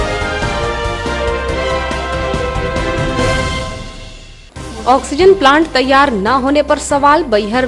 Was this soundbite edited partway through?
no; 0 cuts

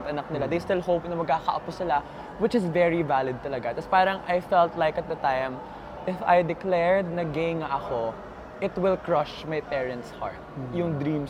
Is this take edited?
no; 0 cuts

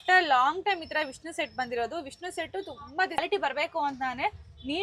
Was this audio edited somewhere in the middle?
yes; 1 cut; at 3.2 s

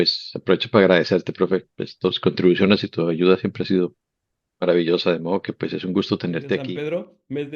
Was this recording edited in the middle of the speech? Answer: yes; 1 cut; at 6.6 s

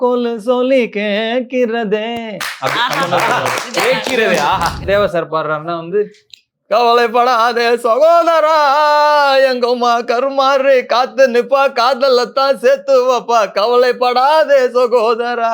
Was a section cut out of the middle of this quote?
yes; 1 cut; at 4.8 s

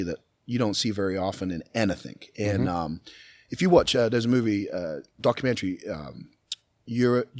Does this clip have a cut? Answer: no; 0 cuts

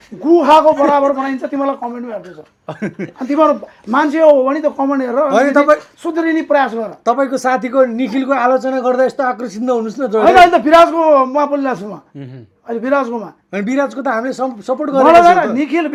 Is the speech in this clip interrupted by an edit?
no; 0 cuts

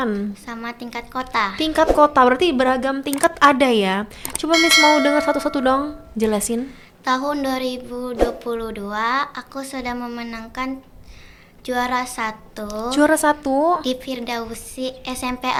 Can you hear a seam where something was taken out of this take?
no; 0 cuts

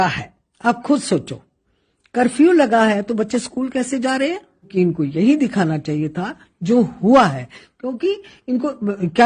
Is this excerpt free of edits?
no; 1 cut; at 4.7 s

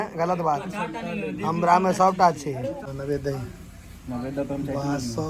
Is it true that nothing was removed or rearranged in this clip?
no; 1 cut; at 2.9 s

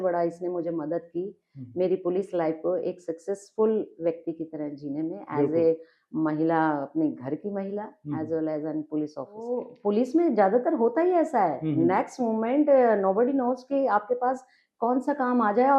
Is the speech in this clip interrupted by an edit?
yes; 1 cut; at 9.7 s

